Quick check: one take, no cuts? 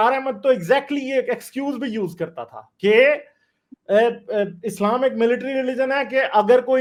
yes; 0 cuts

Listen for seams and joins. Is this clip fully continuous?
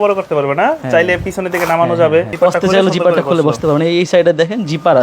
no; 1 cut; at 2.3 s

